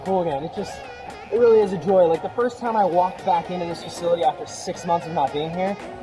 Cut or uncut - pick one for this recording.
uncut